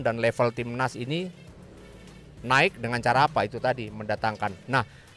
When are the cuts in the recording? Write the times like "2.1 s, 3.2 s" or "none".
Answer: none